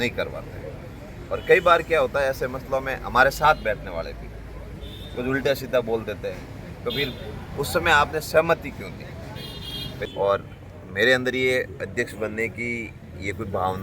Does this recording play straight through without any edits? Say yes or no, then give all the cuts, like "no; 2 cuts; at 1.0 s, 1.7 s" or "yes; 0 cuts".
no; 1 cut; at 10.1 s